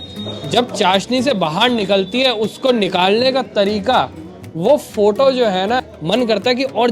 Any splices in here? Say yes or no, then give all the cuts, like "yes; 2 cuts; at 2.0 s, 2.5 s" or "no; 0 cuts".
yes; 1 cut; at 5.8 s